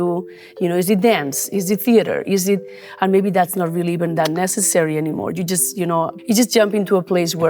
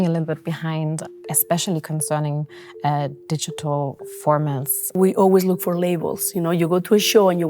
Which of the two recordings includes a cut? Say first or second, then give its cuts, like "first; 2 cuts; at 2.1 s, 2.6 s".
second; 1 cut; at 4.9 s